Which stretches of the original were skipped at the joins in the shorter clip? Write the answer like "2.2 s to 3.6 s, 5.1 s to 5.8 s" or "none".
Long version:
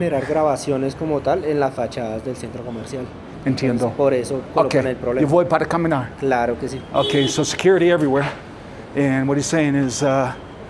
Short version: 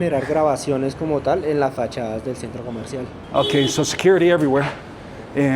3.2 s to 6.8 s